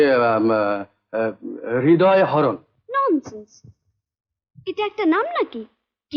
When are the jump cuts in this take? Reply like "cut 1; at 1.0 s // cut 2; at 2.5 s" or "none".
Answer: none